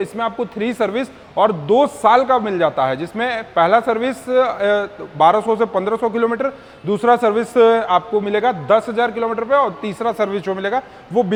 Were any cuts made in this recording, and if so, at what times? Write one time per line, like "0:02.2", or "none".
none